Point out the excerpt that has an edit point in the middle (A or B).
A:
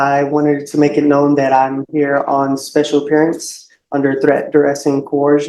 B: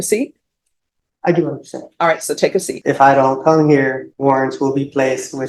B